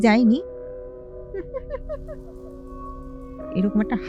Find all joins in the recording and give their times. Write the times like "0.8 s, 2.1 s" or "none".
none